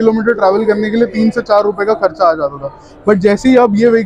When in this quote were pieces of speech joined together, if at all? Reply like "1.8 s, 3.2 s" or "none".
none